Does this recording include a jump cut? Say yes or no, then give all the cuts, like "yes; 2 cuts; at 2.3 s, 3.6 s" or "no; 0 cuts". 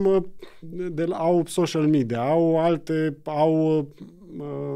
no; 0 cuts